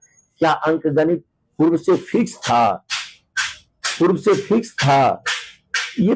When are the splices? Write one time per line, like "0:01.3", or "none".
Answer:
none